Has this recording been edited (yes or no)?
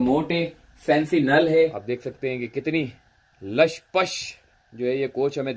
yes